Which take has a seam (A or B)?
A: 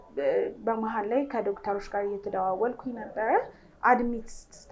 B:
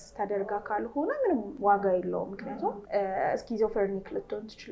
B